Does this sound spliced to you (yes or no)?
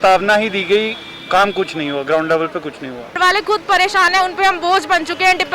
yes